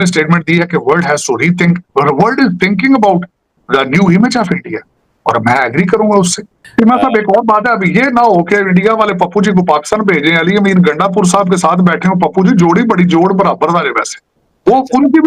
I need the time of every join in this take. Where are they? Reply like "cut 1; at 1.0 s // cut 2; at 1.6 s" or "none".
cut 1; at 6.6 s